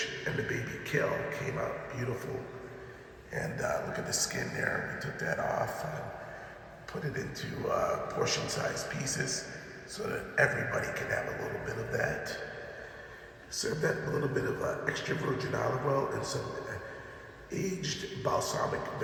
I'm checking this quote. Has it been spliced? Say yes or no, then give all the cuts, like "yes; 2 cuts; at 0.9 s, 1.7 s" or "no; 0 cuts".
no; 0 cuts